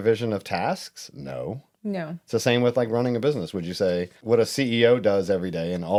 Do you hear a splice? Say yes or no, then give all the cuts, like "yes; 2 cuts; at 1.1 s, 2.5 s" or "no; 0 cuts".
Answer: no; 0 cuts